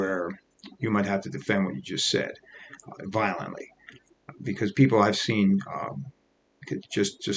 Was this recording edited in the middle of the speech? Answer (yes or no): no